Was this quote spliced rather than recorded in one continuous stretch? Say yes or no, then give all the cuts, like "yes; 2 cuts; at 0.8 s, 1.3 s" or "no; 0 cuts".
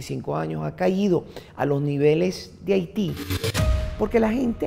yes; 1 cut; at 3.6 s